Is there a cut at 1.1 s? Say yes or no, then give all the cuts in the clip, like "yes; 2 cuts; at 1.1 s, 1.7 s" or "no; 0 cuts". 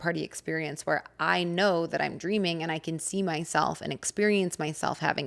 no; 0 cuts